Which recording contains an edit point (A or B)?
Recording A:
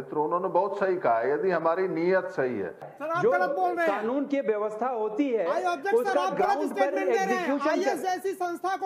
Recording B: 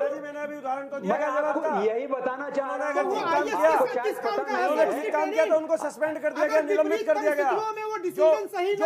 A